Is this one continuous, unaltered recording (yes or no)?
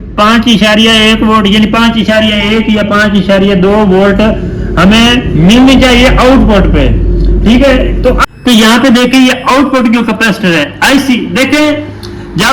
no